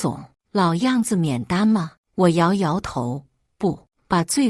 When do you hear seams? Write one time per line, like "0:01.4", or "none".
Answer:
0:02.0